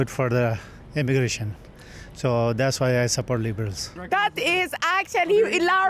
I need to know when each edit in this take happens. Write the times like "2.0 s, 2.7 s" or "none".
4.0 s